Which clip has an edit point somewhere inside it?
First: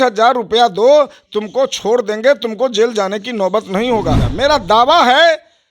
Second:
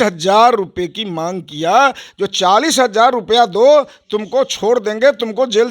first; 1 cut; at 4.2 s

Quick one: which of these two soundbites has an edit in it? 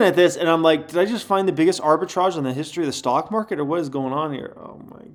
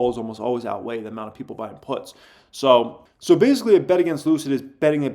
second; 1 cut; at 3.0 s

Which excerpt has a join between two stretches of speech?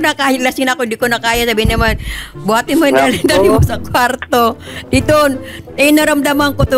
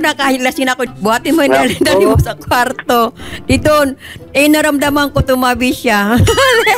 second; 1 cut; at 0.9 s

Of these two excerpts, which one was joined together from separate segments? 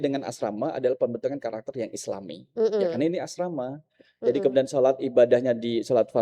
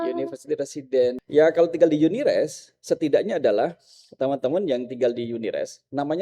second; 1 cut; at 1.2 s

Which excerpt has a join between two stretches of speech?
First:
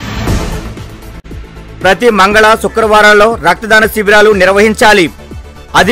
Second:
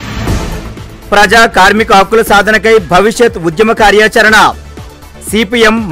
first; 1 cut; at 0.9 s

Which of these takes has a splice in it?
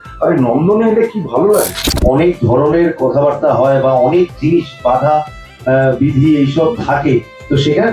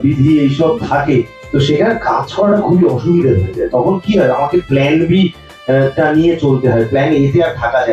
first; 1 cut; at 1.9 s

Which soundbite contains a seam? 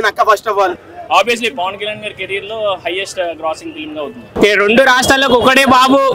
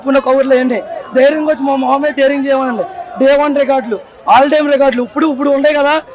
first; 2 cuts; at 0.8 s, 4.2 s

